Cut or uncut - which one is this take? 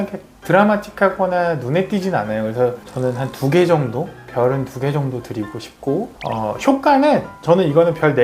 cut